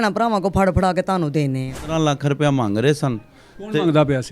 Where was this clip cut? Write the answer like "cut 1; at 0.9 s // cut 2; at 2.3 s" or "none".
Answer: cut 1; at 1.9 s